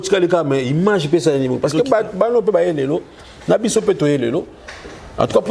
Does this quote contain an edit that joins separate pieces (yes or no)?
no